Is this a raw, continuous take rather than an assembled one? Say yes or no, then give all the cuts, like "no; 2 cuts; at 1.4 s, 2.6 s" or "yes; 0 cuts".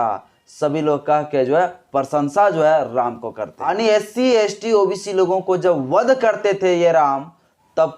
no; 1 cut; at 3.6 s